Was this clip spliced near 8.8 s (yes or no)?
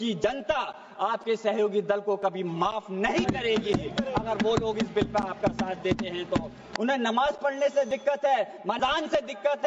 yes